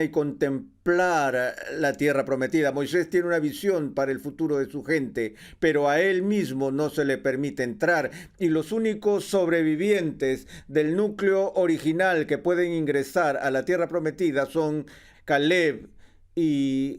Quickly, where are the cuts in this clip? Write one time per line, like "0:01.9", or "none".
0:15.1